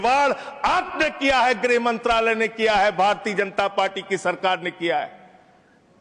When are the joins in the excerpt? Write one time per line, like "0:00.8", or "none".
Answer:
none